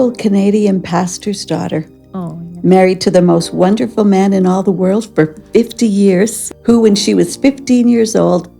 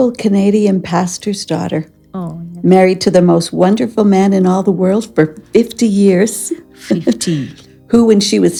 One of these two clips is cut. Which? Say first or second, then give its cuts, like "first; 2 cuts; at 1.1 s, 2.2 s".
first; 1 cut; at 6.5 s